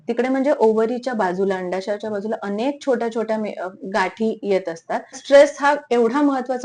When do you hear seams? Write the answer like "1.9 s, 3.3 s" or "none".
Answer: 5.2 s